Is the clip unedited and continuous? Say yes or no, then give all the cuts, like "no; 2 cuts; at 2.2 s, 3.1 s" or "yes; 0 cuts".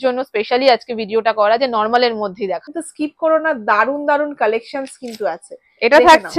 no; 1 cut; at 2.8 s